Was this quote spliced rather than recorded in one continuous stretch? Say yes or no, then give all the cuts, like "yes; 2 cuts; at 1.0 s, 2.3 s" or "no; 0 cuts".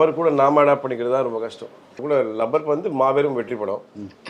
yes; 1 cut; at 2.0 s